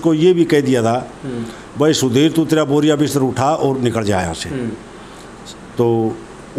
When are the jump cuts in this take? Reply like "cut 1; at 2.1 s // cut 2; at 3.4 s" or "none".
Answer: none